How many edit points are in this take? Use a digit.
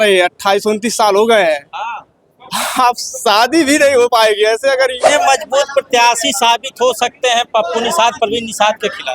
1